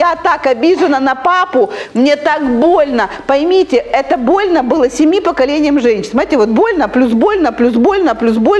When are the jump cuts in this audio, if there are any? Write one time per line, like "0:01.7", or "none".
none